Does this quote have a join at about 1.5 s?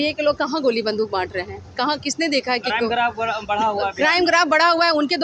no; 0 cuts

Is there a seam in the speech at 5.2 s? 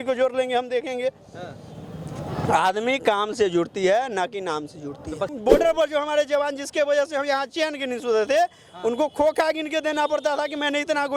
yes; 1 cut; at 5.2 s

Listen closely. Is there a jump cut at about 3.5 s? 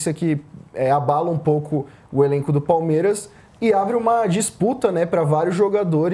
no; 0 cuts

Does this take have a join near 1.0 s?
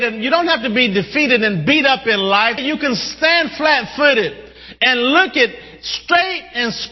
no; 1 cut; at 2.6 s

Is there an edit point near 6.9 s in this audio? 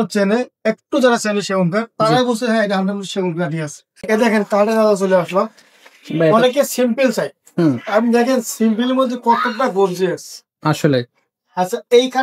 no; 1 cut; at 4.0 s

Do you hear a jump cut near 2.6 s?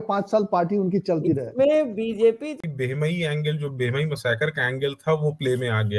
yes; 1 cut; at 2.6 s

